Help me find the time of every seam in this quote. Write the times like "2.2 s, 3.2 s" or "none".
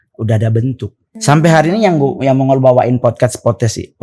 1.1 s